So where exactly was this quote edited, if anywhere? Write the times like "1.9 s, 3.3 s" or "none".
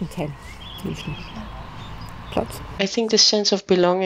2.8 s

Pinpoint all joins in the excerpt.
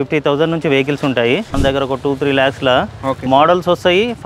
1.5 s

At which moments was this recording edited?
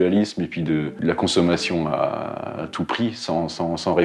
1.0 s

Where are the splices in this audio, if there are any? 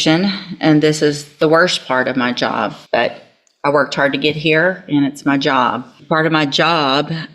2.8 s, 6.0 s

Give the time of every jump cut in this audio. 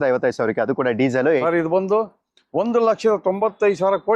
1.4 s

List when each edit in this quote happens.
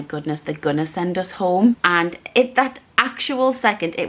1.8 s

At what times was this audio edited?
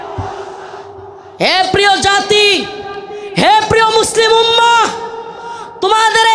1.1 s

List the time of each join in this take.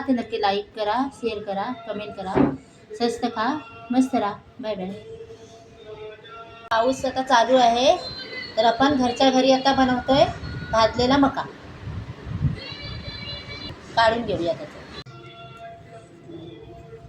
6.6 s, 15.1 s

